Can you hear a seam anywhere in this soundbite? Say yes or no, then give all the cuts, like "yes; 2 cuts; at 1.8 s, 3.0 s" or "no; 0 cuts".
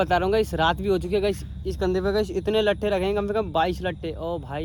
no; 0 cuts